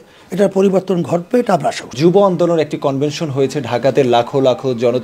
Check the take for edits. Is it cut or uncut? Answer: uncut